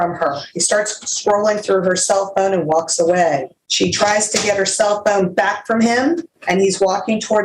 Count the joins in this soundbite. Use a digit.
2